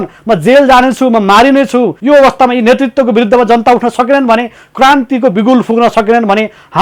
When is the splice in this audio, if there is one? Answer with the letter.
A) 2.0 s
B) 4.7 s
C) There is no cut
A